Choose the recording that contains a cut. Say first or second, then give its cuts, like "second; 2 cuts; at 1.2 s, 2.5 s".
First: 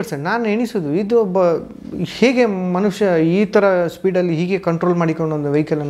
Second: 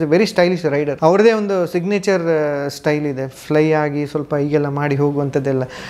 second; 1 cut; at 0.9 s